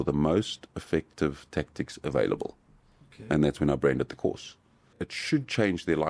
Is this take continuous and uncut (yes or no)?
no